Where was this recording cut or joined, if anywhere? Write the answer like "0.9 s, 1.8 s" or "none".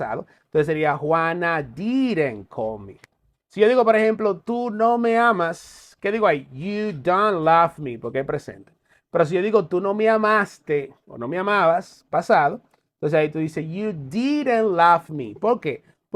none